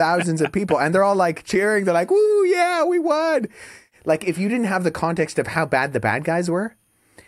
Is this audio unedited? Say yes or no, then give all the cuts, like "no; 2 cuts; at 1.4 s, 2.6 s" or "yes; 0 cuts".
no; 1 cut; at 3.9 s